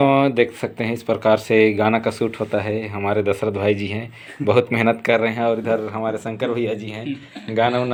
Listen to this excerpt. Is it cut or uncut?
uncut